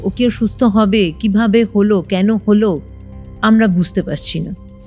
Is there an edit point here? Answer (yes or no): no